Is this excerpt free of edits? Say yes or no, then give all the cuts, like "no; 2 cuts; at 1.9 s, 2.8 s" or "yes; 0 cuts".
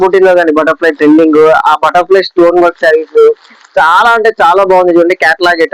yes; 0 cuts